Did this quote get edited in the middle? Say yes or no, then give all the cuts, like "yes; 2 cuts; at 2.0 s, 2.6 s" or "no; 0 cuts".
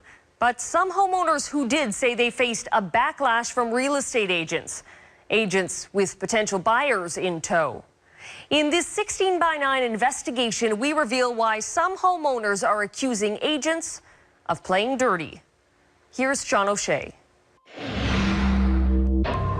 yes; 1 cut; at 10.1 s